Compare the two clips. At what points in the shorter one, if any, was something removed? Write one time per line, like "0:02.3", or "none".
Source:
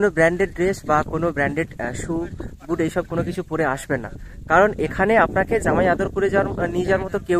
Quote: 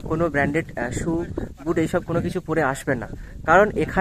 none